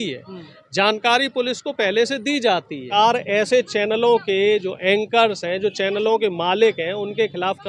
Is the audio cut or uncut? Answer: cut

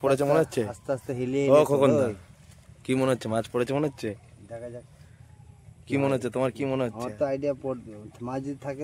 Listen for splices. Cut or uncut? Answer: uncut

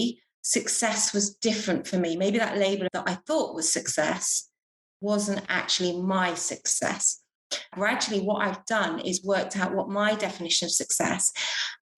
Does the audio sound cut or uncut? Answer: cut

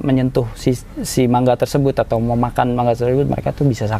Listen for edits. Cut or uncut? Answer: uncut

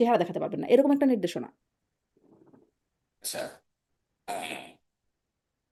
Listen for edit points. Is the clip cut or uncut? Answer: uncut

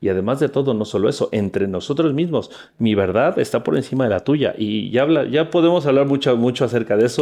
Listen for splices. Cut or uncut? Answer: uncut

